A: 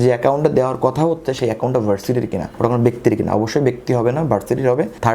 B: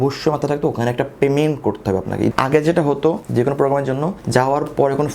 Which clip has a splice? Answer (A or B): B